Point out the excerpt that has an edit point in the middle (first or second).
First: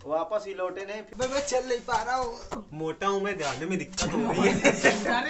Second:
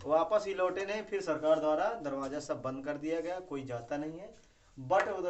first